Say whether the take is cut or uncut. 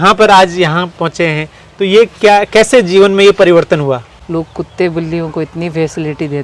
cut